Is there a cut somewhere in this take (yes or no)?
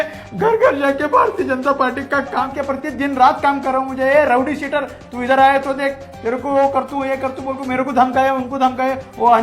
yes